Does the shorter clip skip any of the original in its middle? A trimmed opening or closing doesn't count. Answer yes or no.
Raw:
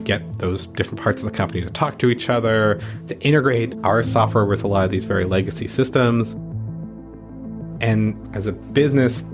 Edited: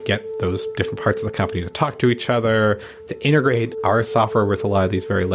no